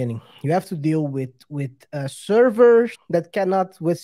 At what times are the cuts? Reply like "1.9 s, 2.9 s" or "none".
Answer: 3.0 s